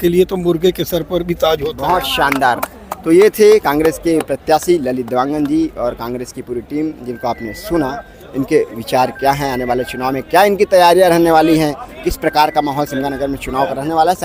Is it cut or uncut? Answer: uncut